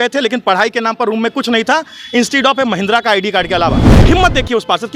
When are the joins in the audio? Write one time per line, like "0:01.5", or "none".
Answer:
0:03.9